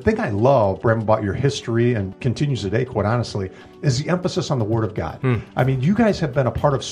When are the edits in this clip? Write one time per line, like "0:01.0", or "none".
0:00.8
0:02.1